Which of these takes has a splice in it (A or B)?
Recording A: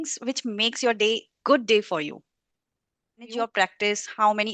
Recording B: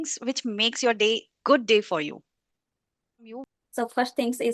A